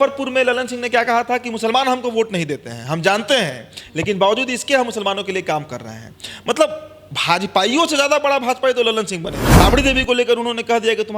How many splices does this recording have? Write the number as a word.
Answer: one